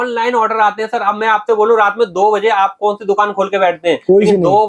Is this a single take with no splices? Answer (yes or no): yes